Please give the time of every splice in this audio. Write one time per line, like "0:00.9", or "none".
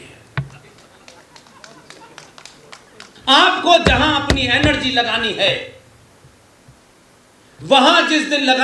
0:03.1